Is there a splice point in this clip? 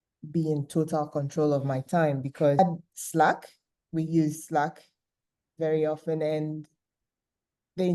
no; 0 cuts

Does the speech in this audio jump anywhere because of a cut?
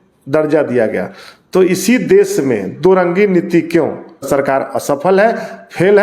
yes; 1 cut; at 4.3 s

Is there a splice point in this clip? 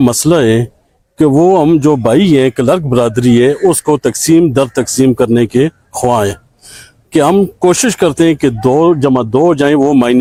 no; 0 cuts

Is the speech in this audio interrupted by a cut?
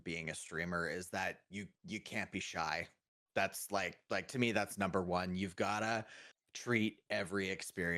no; 0 cuts

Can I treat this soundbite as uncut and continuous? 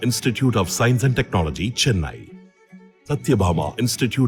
yes; 0 cuts

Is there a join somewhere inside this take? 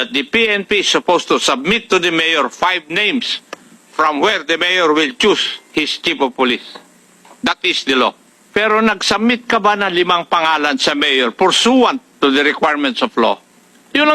yes; 1 cut; at 8.3 s

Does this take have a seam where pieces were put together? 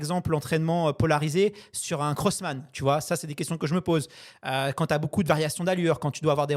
no; 0 cuts

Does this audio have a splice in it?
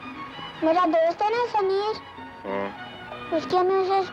no; 0 cuts

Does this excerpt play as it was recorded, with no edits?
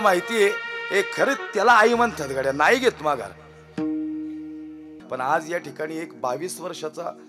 no; 1 cut; at 5.0 s

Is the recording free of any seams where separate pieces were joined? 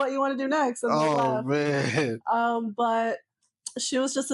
yes; 0 cuts

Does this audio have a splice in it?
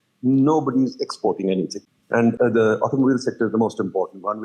yes; 1 cut; at 2.3 s

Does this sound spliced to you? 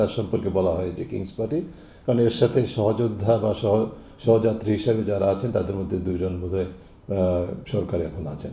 no; 0 cuts

